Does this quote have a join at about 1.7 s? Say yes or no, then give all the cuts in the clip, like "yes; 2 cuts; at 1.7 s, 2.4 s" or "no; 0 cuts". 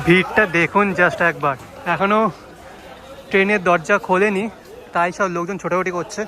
yes; 1 cut; at 1.7 s